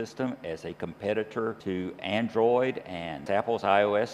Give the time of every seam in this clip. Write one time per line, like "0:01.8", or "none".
0:01.6